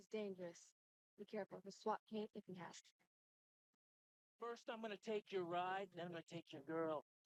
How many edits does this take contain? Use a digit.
0